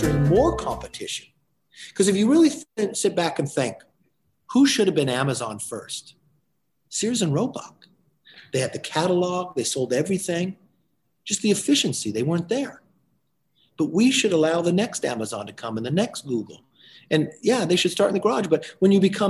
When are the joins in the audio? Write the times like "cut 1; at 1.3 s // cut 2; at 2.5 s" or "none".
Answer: cut 1; at 2.7 s

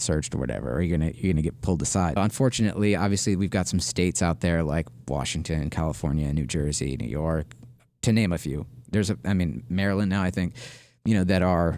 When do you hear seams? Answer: cut 1; at 2.2 s

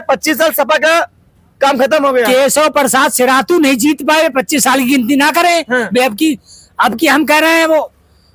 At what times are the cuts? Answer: none

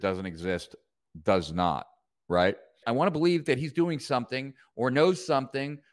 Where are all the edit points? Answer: cut 1; at 2.8 s

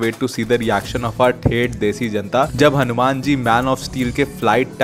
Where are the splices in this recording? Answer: none

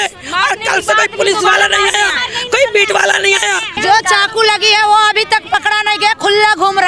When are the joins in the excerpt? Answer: cut 1; at 3.7 s

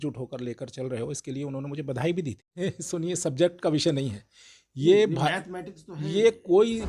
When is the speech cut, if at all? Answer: cut 1; at 2.6 s

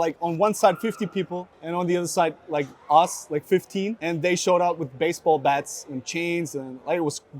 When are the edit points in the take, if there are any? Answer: cut 1; at 1.5 s // cut 2; at 4.0 s

